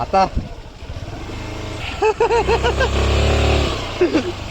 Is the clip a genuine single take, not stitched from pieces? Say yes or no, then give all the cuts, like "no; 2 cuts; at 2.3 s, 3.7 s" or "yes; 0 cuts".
no; 1 cut; at 1.8 s